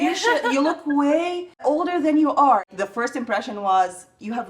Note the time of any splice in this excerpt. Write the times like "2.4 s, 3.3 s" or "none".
1.6 s, 2.6 s